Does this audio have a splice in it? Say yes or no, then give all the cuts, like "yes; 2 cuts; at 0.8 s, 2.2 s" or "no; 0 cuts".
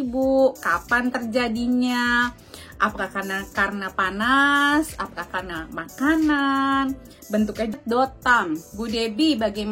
yes; 1 cut; at 7.8 s